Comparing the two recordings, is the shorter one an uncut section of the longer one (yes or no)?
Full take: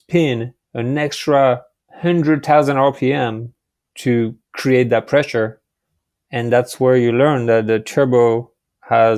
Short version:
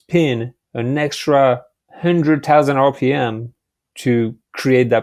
yes